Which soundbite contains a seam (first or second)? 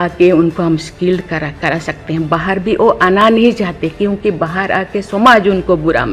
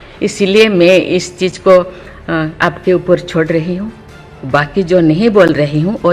second